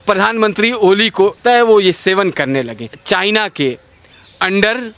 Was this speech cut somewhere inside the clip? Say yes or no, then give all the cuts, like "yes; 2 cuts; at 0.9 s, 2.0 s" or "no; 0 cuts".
yes; 2 cuts; at 1.4 s, 2.9 s